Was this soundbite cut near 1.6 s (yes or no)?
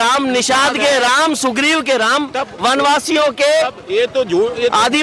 no